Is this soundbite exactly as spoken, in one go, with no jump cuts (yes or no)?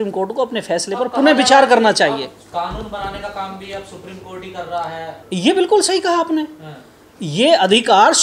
yes